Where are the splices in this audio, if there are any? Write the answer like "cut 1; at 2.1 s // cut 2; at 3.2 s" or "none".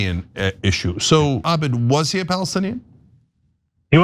cut 1; at 1.4 s